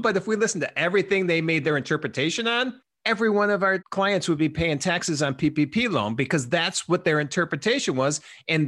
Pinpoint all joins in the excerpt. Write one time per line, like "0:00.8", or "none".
0:02.9
0:03.8